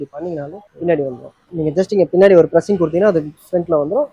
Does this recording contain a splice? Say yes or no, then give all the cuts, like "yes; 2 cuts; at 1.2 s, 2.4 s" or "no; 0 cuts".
yes; 1 cut; at 1.1 s